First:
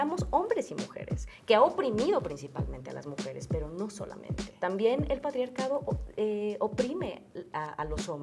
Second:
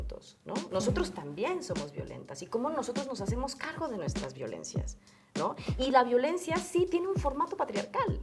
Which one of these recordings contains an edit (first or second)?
first